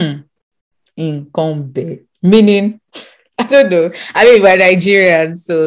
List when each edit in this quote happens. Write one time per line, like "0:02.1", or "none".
none

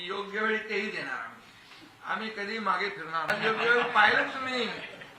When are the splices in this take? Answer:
0:03.3

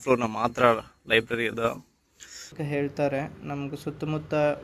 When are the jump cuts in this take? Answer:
0:02.5

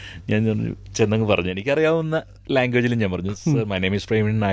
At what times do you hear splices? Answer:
none

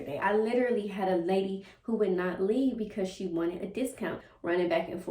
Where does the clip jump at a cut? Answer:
0:04.2

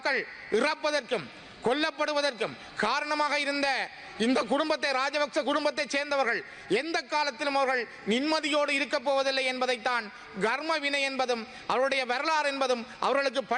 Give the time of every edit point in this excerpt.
none

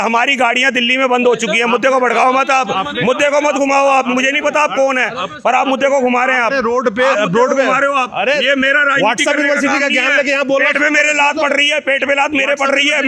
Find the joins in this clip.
none

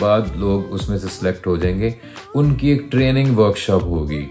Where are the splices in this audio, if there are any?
none

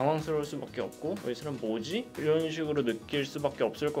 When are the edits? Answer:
0:02.1

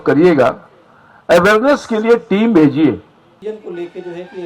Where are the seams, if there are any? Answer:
0:03.4

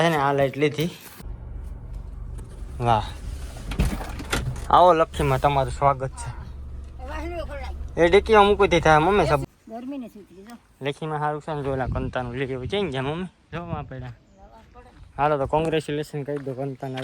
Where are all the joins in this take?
0:01.1
0:09.4

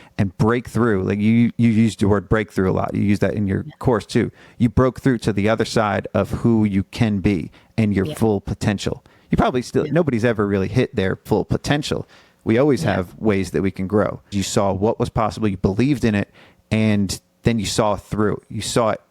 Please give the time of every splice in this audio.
0:14.3

